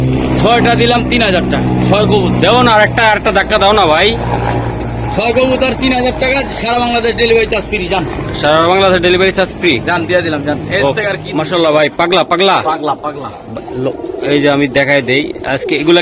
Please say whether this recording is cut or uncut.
uncut